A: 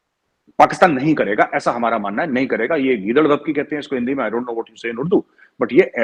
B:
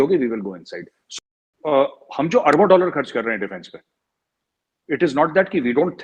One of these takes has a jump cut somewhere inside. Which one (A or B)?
B